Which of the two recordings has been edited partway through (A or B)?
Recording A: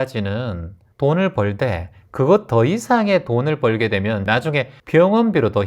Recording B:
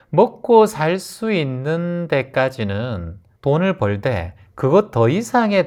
A